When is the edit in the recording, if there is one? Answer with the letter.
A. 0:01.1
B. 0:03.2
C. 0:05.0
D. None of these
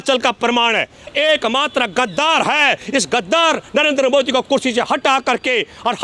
A